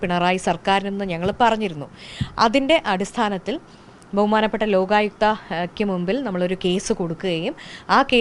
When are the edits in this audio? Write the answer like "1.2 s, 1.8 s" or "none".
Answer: none